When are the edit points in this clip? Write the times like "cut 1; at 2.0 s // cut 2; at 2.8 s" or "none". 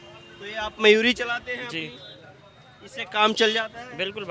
none